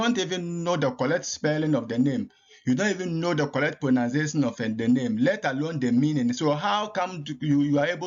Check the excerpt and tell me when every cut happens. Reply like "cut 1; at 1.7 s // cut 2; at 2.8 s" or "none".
none